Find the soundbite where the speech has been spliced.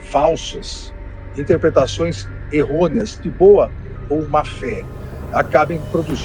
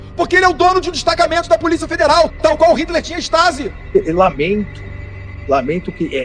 second; 1 cut; at 3.9 s

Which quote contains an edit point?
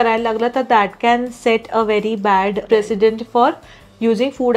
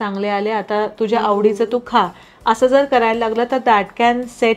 first; 1 cut; at 2.6 s

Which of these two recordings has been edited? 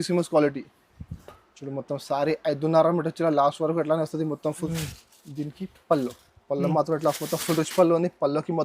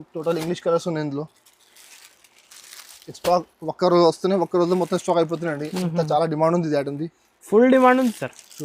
first; 1 cut; at 4.7 s

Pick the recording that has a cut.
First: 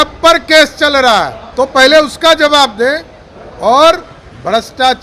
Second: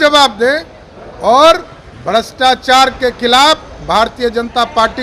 first; 1 cut; at 1.4 s

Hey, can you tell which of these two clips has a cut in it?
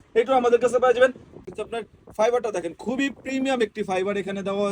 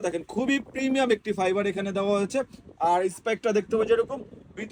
first; 1 cut; at 1.4 s

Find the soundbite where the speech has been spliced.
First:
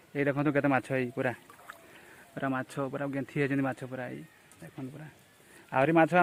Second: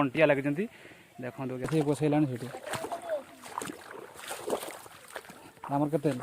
second; 1 cut; at 1.7 s

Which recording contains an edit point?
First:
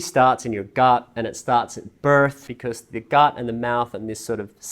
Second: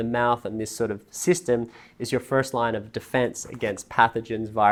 first; 1 cut; at 2.5 s

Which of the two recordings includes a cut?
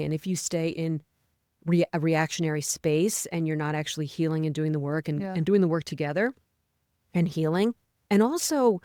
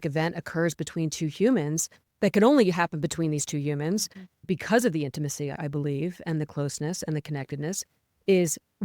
second; 1 cut; at 2.1 s

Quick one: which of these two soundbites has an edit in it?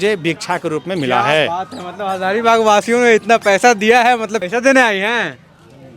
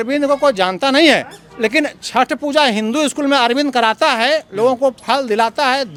first; 1 cut; at 4.4 s

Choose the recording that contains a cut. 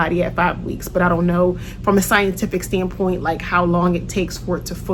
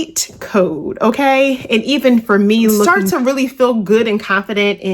second; 1 cut; at 2.9 s

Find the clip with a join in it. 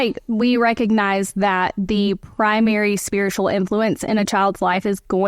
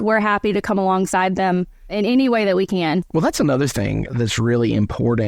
second; 3 cuts; at 1.9 s, 3.1 s, 4.1 s

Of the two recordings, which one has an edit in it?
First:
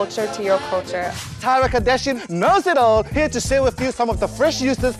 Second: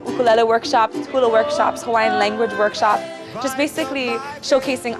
first; 1 cut; at 1.3 s

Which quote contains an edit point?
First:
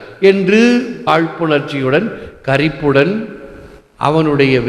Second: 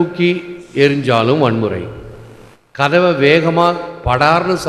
first; 1 cut; at 1.0 s

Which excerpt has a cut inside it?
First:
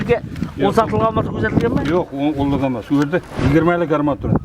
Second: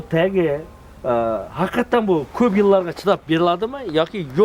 first; 1 cut; at 3.3 s

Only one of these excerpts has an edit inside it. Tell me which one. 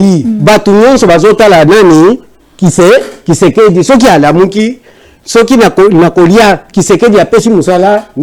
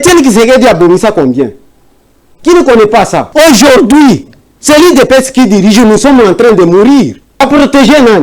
second; 2 cuts; at 3.3 s, 7.4 s

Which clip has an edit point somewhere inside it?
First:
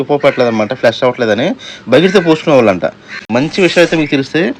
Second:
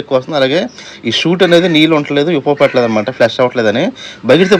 first; 1 cut; at 3.2 s

